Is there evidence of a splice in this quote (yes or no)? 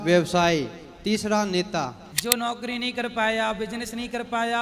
yes